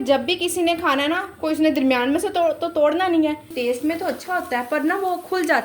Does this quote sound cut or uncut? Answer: cut